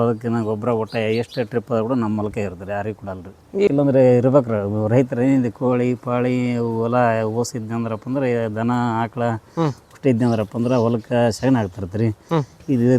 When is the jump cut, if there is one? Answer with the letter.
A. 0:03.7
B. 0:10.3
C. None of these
A